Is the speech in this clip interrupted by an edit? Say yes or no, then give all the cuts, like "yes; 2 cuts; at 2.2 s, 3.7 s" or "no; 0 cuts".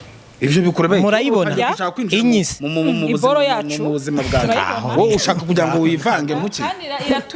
no; 0 cuts